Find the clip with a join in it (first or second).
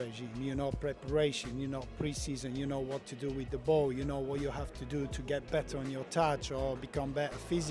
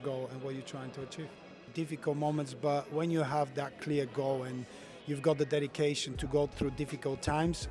second